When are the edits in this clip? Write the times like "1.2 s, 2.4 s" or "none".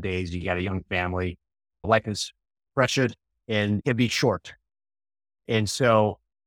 3.8 s